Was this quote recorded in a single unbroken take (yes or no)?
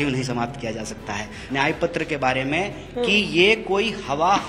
no